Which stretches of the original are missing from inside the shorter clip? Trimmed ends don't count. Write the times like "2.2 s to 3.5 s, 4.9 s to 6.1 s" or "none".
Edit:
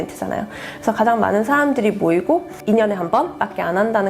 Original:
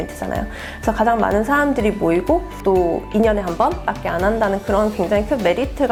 2.6 s to 3.0 s